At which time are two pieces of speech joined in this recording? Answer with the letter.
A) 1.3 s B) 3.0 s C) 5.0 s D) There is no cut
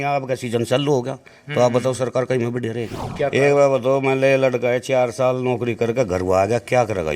B